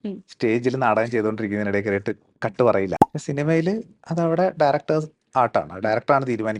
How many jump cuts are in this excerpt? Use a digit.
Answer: 1